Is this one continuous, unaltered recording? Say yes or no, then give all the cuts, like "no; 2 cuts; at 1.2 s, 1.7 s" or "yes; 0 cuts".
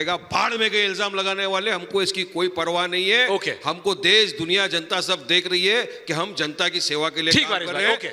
yes; 0 cuts